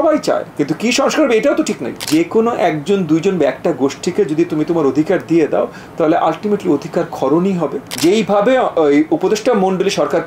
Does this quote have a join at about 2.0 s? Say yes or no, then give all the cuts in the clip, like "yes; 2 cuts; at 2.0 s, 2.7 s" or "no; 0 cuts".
yes; 2 cuts; at 2.0 s, 7.8 s